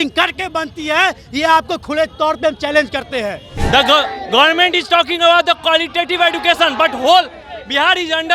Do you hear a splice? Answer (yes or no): yes